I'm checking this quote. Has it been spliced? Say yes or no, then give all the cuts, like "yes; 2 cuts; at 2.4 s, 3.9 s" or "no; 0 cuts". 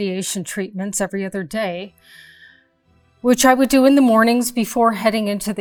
no; 0 cuts